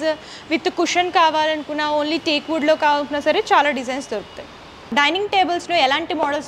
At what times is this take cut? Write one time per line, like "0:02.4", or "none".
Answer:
none